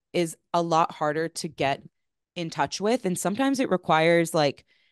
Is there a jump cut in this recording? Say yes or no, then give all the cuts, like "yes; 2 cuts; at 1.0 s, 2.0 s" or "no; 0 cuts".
no; 0 cuts